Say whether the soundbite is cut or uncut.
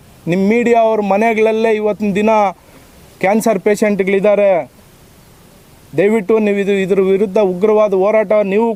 uncut